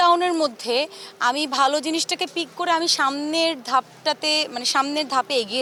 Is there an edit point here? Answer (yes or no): no